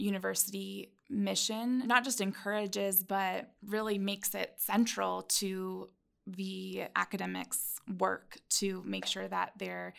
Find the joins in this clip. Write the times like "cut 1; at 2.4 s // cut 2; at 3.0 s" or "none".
cut 1; at 1.9 s